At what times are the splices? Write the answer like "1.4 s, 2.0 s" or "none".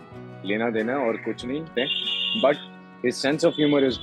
1.7 s